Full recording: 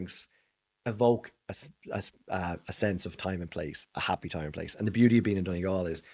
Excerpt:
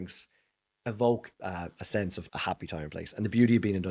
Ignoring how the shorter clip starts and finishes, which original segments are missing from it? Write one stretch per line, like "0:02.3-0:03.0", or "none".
0:01.3-0:02.2
0:03.1-0:03.8